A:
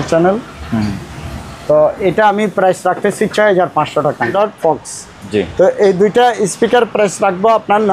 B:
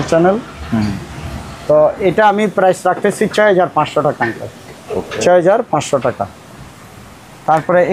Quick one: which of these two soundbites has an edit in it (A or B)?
A